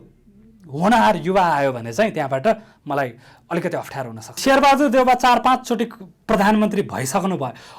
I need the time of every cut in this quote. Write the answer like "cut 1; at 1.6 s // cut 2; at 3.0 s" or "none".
cut 1; at 4.4 s